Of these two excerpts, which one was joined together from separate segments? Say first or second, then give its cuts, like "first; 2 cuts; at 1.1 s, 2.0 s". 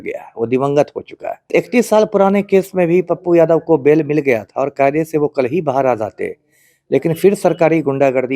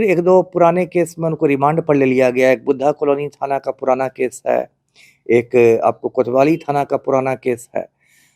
first; 1 cut; at 1.4 s